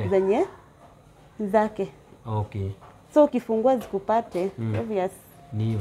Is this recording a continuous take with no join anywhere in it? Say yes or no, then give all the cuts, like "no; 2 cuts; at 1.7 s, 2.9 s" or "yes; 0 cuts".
yes; 0 cuts